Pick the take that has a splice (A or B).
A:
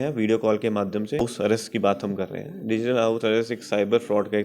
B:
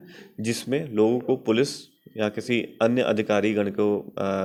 A